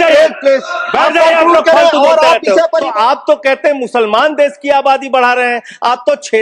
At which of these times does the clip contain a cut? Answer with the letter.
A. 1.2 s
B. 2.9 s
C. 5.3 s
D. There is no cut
B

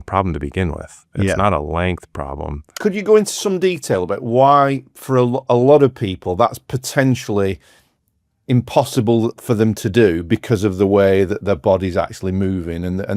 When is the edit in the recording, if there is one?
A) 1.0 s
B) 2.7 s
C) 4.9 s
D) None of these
B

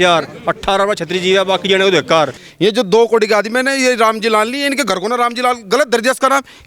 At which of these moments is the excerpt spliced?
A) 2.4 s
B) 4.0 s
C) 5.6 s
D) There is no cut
A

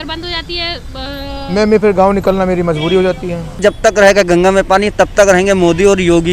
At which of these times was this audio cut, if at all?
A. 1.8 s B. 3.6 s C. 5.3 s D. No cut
B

